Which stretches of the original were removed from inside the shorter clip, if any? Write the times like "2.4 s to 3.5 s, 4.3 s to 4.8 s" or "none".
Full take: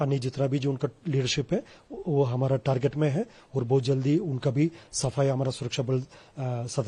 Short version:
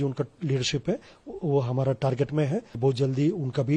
3.4 s to 3.6 s